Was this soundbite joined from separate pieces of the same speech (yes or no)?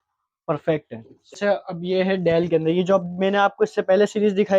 yes